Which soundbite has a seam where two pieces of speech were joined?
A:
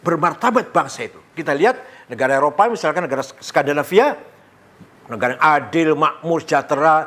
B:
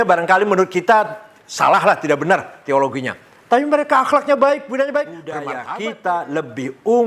B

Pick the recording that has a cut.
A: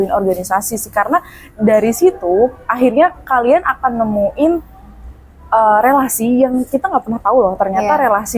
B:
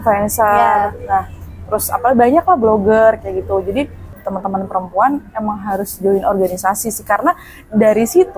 B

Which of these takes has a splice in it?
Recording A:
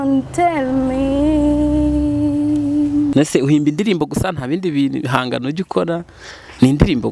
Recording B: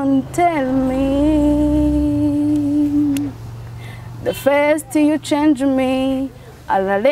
A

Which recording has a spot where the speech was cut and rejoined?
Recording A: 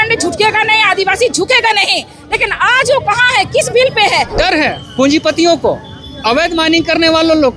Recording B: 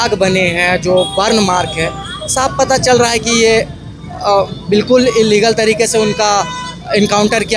A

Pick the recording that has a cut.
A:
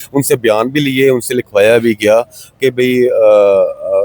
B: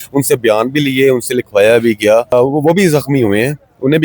B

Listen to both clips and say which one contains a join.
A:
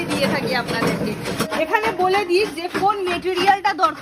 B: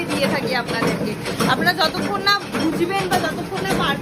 A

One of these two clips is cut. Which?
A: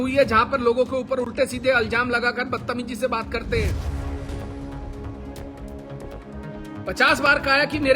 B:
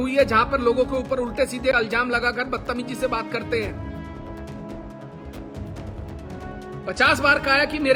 A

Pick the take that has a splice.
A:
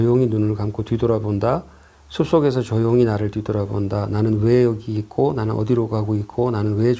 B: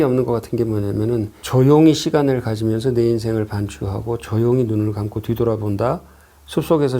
B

